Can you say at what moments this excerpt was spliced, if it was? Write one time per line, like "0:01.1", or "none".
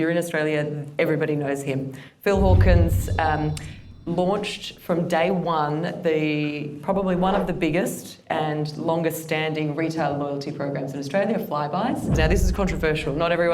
0:12.2